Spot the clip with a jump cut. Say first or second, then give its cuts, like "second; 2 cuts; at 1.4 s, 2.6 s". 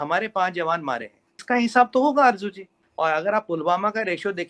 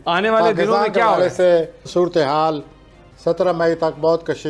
first; 1 cut; at 2.7 s